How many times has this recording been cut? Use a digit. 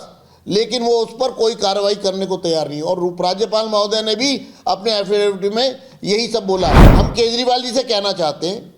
1